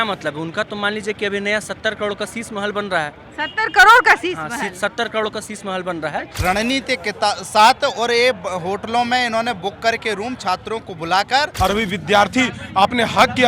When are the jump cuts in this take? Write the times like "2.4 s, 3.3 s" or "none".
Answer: 6.3 s, 11.5 s